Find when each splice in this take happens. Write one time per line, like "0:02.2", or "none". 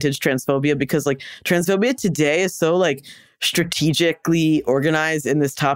none